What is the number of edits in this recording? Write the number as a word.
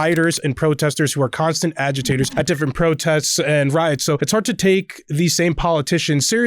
two